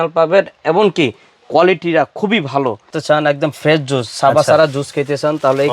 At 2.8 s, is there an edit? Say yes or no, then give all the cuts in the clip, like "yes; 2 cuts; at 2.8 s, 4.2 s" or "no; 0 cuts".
yes; 1 cut; at 2.8 s